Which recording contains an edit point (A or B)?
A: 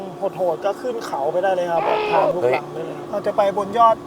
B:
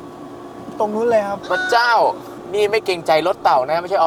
A